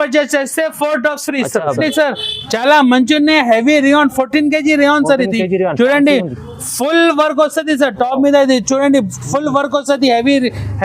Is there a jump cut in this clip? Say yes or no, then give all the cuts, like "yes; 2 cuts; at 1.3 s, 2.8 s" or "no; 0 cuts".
yes; 1 cut; at 1.8 s